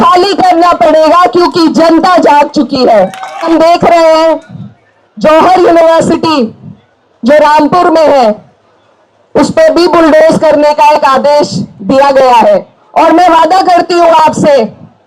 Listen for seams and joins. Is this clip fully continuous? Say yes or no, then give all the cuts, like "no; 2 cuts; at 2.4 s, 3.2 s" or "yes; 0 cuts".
no; 2 cuts; at 3.5 s, 12.8 s